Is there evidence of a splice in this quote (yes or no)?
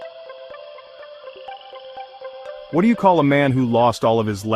yes